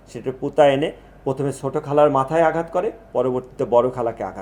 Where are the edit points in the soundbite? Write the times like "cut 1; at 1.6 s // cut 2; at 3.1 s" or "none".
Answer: none